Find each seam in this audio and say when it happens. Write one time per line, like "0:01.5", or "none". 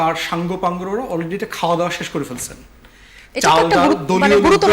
none